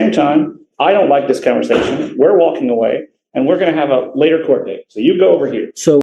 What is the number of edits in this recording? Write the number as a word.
zero